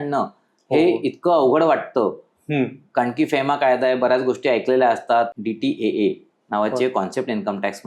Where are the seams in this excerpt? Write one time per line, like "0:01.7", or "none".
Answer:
0:05.3